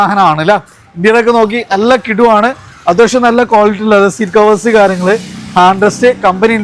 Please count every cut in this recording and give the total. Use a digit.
0